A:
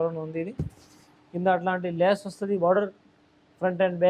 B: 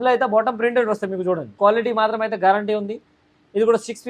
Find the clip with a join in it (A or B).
B